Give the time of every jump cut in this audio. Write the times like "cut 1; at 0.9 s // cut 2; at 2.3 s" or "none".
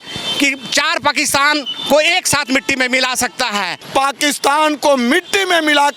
cut 1; at 3.8 s